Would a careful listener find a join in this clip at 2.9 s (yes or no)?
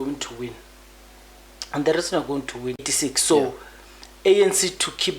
yes